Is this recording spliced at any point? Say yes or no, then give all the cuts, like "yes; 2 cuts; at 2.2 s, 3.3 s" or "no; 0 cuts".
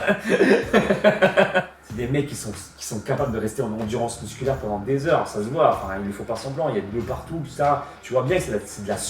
yes; 1 cut; at 1.8 s